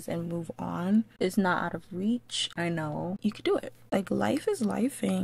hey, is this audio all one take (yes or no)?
no